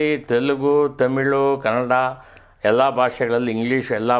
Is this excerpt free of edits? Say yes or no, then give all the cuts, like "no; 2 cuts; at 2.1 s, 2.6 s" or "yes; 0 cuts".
yes; 0 cuts